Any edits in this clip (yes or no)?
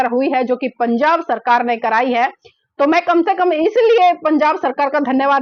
no